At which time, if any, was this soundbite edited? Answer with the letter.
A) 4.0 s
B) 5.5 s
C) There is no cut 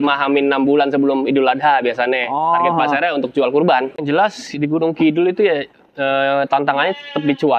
A